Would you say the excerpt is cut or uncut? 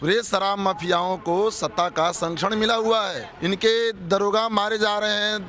cut